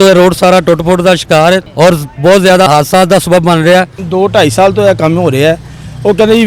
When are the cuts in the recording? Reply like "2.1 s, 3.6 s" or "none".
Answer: 2.7 s, 4.0 s